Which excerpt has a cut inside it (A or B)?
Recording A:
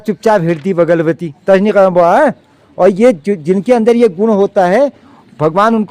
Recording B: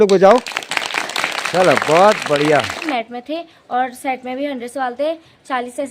B